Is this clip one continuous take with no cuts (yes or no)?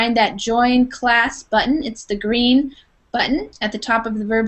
yes